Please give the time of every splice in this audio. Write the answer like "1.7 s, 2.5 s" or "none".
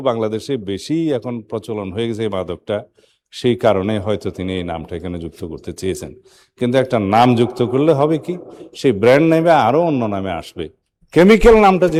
none